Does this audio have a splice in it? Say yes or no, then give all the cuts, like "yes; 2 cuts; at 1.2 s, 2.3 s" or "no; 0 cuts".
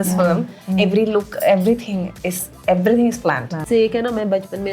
yes; 1 cut; at 3.6 s